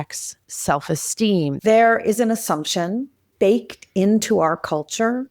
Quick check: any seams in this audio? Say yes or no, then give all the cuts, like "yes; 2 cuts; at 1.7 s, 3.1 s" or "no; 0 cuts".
yes; 2 cuts; at 1.6 s, 3.2 s